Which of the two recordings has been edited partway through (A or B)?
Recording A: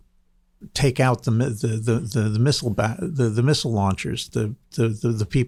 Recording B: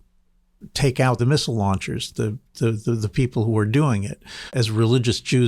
B